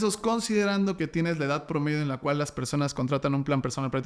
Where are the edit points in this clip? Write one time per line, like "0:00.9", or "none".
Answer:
none